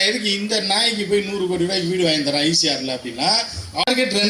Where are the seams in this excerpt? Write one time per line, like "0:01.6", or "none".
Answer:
none